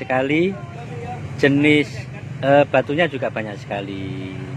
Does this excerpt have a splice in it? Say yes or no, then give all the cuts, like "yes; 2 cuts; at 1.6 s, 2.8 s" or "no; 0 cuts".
no; 0 cuts